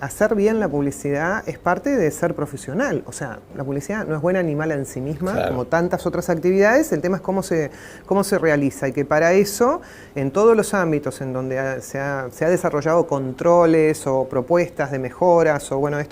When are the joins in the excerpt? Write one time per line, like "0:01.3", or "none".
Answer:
0:10.6